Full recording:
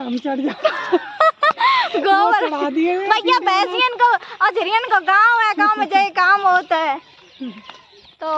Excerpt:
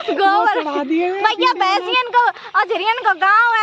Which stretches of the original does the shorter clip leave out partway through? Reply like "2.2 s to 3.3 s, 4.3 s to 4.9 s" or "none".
none